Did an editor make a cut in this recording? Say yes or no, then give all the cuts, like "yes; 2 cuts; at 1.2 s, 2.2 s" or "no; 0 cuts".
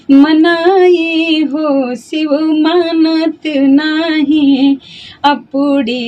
no; 0 cuts